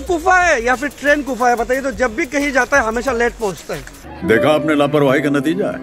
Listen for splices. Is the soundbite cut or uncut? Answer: uncut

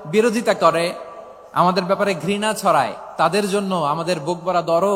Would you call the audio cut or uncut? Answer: uncut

